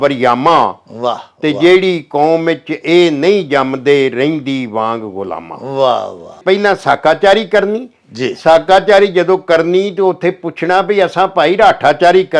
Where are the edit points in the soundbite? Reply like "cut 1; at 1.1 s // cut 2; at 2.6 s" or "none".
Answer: cut 1; at 6.4 s